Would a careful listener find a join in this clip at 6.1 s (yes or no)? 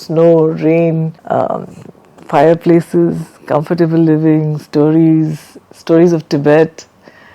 no